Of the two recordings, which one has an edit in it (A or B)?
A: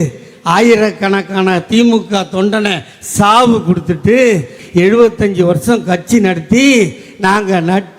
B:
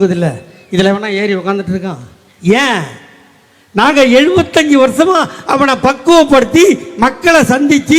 A